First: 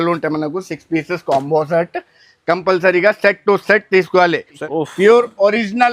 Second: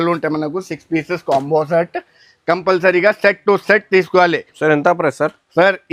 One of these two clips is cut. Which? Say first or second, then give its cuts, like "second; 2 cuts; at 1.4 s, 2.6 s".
first; 1 cut; at 4.6 s